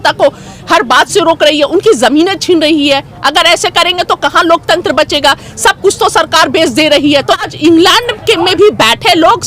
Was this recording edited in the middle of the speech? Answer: yes; 1 cut; at 7.4 s

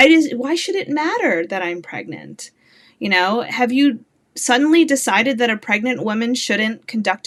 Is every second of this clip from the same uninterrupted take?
yes; 0 cuts

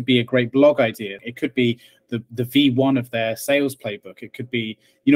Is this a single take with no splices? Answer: no; 1 cut; at 1.2 s

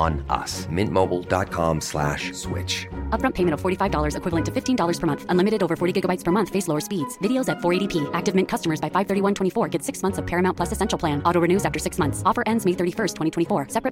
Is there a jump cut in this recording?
no; 0 cuts

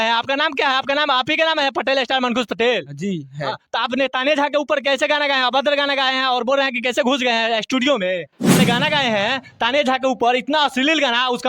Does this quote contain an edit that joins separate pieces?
yes; 1 cut; at 8.5 s

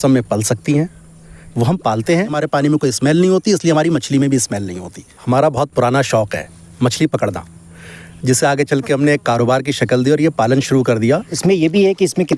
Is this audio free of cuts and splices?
no; 3 cuts; at 2.3 s, 5.2 s, 11.3 s

